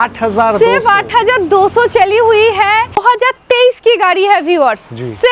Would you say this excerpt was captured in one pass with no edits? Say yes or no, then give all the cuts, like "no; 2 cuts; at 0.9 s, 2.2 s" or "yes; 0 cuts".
no; 1 cut; at 3.0 s